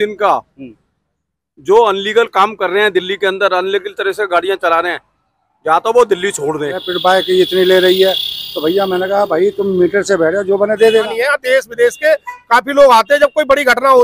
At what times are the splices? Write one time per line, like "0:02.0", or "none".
0:06.9
0:11.1

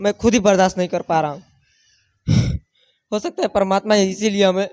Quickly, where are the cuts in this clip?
none

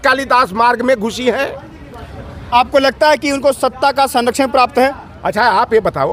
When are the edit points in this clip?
none

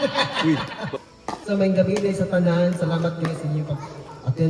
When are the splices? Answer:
0:01.0

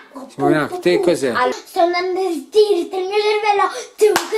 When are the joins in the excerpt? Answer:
0:01.5

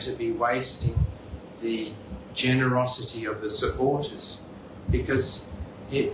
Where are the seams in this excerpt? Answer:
none

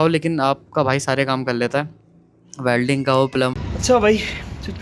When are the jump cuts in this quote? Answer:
0:03.5

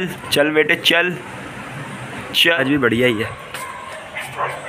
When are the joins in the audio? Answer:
0:02.6

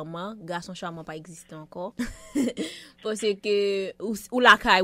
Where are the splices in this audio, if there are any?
0:01.9

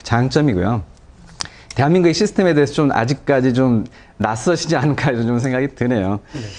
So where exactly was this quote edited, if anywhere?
none

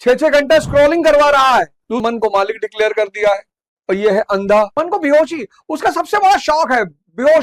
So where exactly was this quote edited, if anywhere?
0:02.0
0:04.7

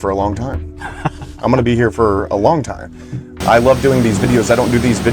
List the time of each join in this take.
0:03.3

